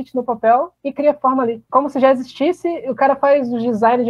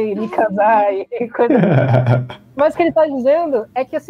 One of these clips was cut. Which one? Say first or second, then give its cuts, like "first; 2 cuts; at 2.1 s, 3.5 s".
first; 1 cut; at 1.6 s